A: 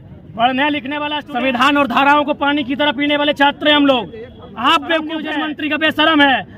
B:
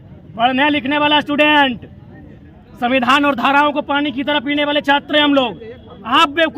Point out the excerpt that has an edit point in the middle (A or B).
A